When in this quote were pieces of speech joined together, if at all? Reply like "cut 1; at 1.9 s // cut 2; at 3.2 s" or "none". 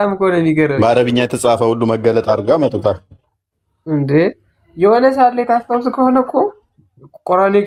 none